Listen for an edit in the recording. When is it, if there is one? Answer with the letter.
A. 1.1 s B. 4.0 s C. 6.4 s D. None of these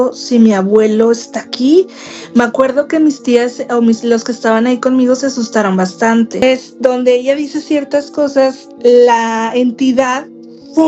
C